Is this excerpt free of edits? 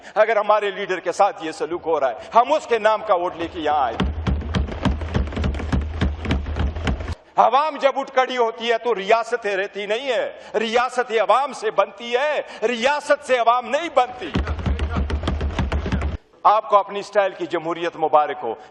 no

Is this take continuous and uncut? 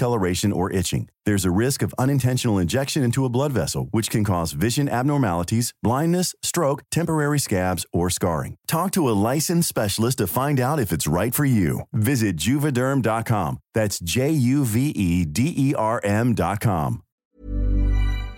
no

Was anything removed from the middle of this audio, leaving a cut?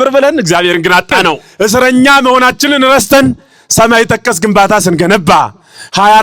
yes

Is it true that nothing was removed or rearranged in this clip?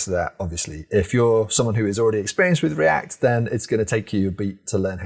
yes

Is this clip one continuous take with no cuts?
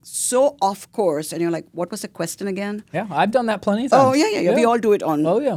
yes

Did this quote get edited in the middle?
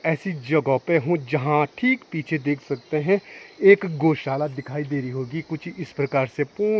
no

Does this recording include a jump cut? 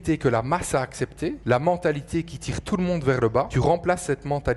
yes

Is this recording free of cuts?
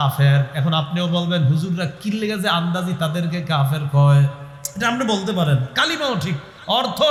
yes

